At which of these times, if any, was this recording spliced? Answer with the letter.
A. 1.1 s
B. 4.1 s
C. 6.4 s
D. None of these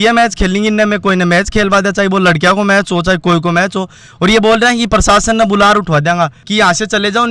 C